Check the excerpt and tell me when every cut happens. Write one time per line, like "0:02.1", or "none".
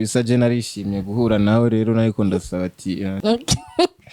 0:03.1

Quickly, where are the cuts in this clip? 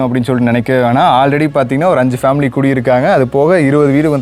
none

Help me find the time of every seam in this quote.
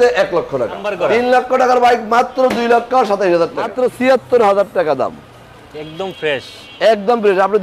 0:00.8
0:03.7

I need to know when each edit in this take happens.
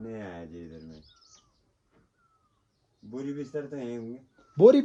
none

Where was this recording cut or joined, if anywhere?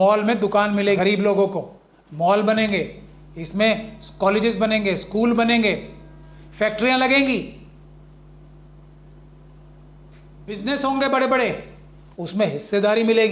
0:01.0
0:10.6

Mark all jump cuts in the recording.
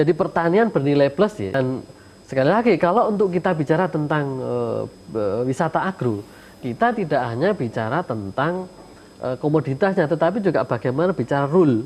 0:01.5

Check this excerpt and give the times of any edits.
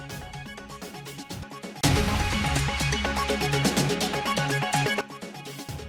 none

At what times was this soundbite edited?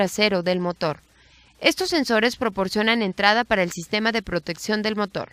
0:02.1

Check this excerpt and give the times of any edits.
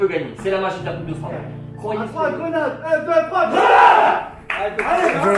0:01.6

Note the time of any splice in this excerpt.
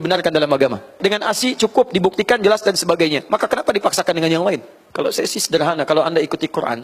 0:01.0
0:04.8

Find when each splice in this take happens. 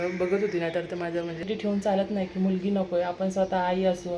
0:01.4

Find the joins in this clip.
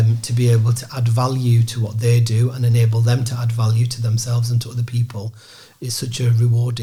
none

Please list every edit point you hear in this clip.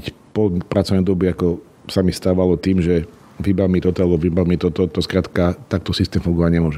none

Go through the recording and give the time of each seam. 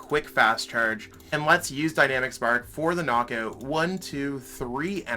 0:01.1

